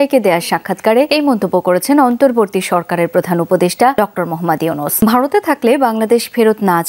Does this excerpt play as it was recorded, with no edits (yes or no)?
no